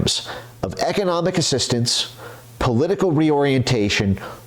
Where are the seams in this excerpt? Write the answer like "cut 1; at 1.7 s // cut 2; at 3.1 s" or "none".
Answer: none

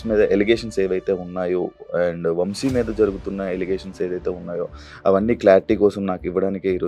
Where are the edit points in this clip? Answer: none

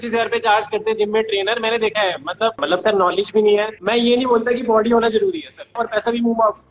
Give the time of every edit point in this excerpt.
cut 1; at 2.6 s // cut 2; at 3.8 s // cut 3; at 5.8 s

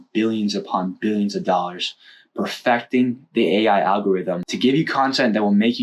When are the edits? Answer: cut 1; at 4.5 s

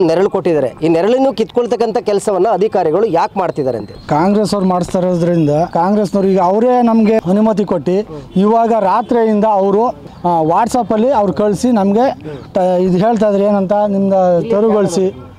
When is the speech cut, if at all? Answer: cut 1; at 3.9 s // cut 2; at 5.7 s // cut 3; at 7.2 s // cut 4; at 10.1 s

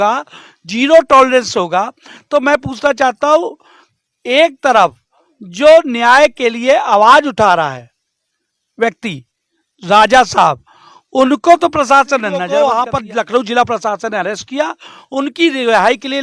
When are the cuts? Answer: cut 1; at 12.4 s

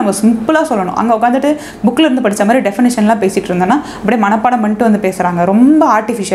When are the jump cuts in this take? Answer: none

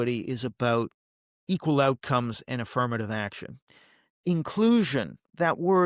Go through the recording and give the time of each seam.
none

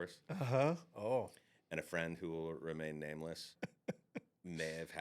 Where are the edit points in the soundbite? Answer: cut 1; at 3.5 s

